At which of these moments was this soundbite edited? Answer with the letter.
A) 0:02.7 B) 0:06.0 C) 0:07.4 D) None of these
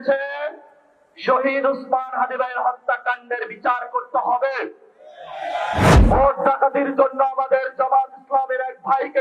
B